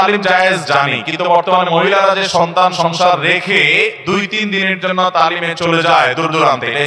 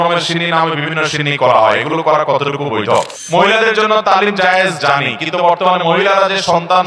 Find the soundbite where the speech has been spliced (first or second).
second